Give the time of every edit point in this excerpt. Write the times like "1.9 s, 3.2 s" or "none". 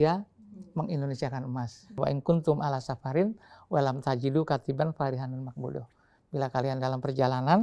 2.0 s